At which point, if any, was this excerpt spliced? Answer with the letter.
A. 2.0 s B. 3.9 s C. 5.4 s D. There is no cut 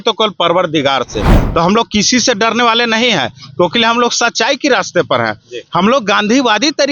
D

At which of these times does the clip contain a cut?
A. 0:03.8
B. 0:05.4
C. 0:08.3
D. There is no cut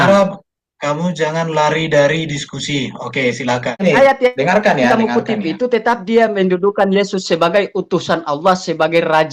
A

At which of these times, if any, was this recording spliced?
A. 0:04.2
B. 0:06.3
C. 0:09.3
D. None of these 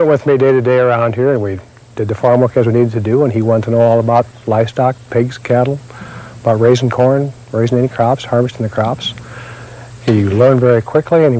B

